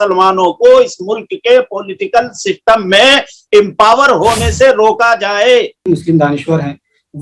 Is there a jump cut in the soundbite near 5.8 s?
yes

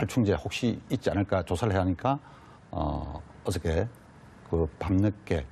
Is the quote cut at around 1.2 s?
no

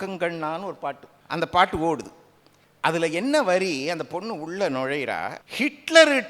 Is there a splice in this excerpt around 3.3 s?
no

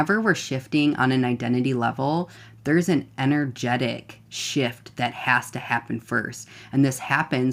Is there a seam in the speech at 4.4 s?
no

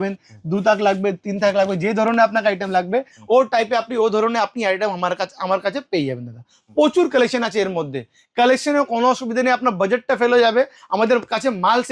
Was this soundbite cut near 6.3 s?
no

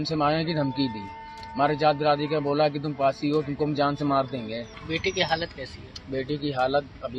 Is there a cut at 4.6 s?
yes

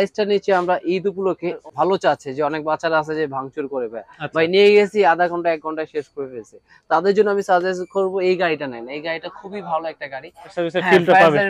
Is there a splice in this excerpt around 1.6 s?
yes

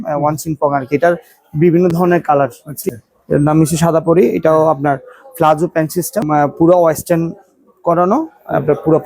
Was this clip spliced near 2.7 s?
yes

